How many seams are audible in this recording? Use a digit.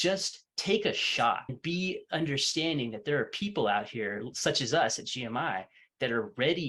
1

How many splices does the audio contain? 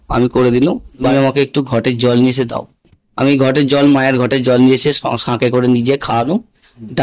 1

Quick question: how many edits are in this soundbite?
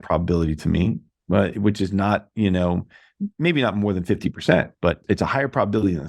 1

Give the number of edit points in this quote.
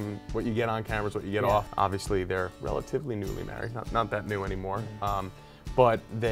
1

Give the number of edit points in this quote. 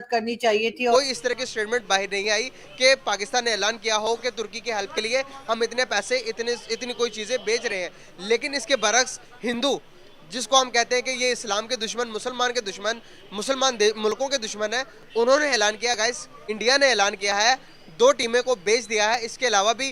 1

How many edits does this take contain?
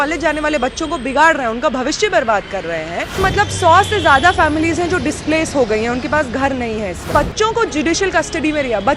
2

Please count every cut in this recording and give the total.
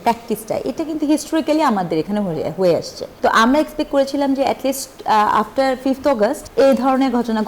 2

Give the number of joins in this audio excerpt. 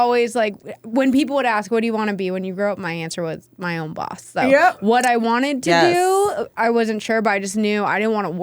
0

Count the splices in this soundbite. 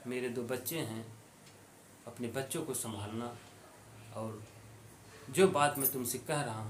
0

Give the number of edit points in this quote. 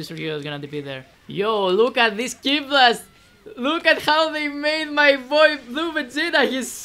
1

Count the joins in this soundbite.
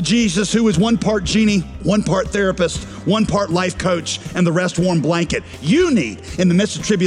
1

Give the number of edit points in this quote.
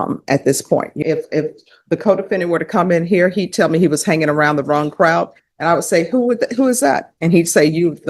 1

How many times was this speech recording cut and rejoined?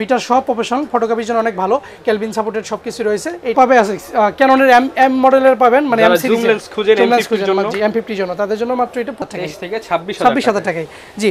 2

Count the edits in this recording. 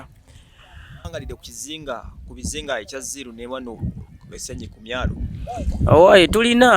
1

